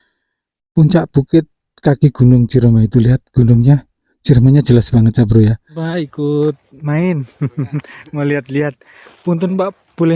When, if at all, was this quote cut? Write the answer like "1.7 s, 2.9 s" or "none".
5.8 s